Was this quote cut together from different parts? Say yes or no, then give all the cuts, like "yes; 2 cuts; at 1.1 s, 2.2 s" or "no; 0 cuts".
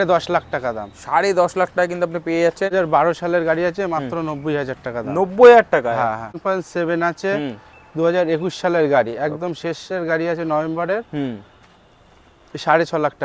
yes; 2 cuts; at 2.7 s, 6.4 s